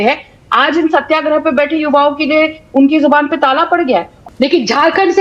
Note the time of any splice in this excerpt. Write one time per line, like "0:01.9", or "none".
0:04.1